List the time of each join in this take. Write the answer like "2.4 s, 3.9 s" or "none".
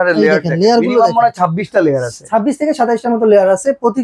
none